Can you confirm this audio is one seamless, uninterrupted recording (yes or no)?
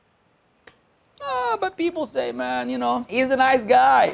no